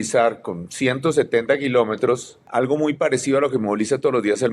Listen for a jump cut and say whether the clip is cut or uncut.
cut